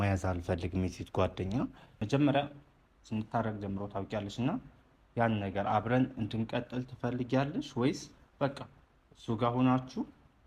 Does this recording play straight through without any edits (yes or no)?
no